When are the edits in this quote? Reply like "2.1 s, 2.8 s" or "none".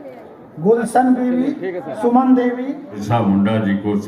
3.0 s